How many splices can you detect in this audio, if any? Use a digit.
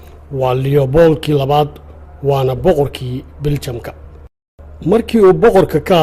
0